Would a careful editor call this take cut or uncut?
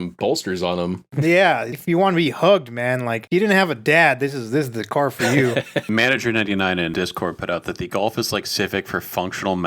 cut